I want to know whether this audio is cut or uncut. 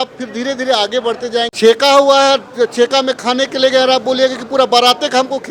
cut